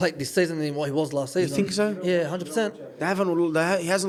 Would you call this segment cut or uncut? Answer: uncut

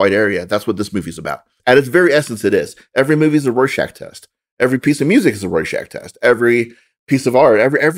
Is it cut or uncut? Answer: cut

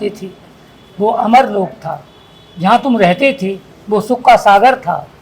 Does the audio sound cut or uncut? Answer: uncut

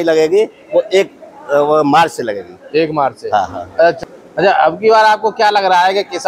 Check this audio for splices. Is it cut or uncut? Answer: cut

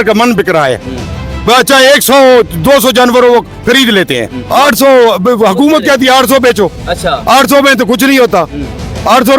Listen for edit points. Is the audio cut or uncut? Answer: cut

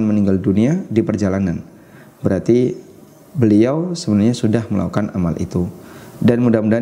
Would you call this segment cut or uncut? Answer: uncut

